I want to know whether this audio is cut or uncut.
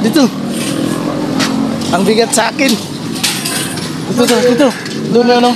uncut